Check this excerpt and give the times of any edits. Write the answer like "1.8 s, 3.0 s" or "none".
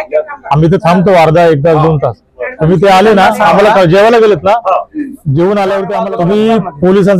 6.0 s